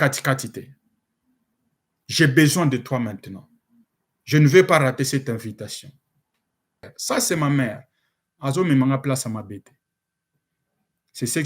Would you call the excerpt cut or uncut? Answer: cut